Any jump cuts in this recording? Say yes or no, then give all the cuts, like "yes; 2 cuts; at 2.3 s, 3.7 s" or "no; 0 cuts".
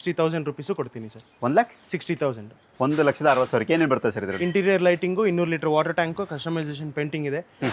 no; 0 cuts